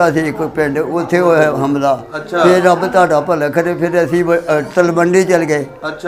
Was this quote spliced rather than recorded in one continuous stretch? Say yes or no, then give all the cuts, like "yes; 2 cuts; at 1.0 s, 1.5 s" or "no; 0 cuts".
no; 0 cuts